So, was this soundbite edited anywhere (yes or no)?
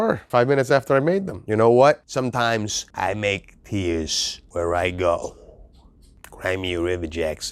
yes